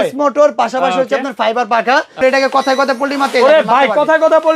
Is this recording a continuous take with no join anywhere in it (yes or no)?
no